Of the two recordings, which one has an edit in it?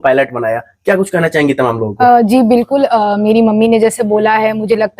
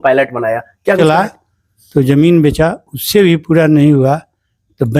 second; 1 cut; at 1.0 s

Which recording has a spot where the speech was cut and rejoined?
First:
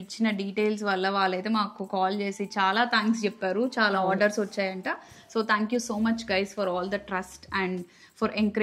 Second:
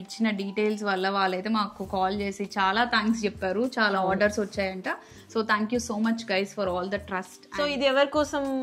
second; 1 cut; at 7.4 s

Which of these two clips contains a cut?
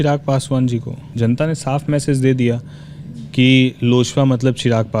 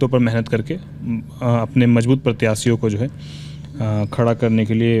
first; 1 cut; at 1.0 s

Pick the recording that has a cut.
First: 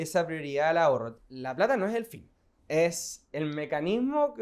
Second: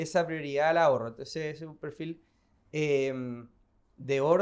first; 1 cut; at 1.2 s

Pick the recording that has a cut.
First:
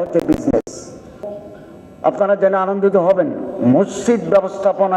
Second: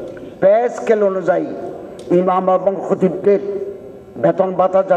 first; 1 cut; at 1.3 s

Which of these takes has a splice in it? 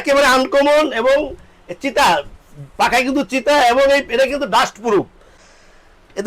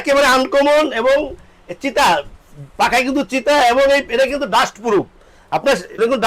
first; 1 cut; at 5.4 s

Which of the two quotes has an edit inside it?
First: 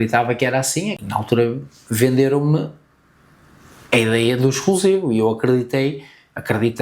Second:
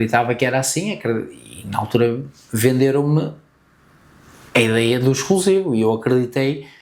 first; 1 cut; at 1.0 s

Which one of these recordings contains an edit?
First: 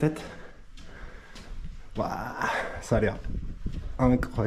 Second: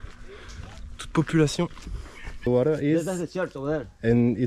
second; 1 cut; at 2.5 s

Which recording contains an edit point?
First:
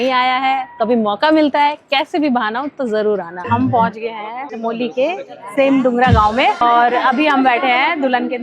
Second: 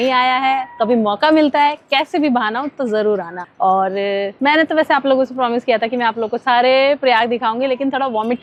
first; 2 cuts; at 3.5 s, 6.6 s

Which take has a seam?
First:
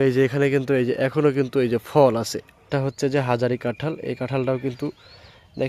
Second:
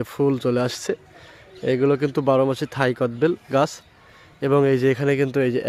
first; 1 cut; at 2.7 s

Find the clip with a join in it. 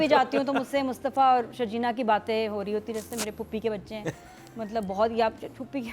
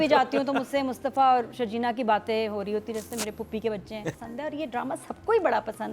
second; 1 cut; at 4.2 s

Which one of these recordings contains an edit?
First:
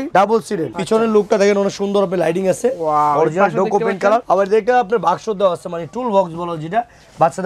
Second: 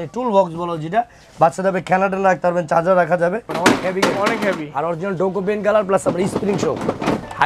second; 1 cut; at 3.5 s

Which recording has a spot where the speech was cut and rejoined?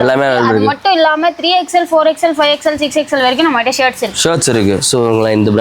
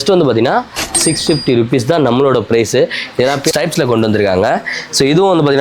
second; 1 cut; at 3.5 s

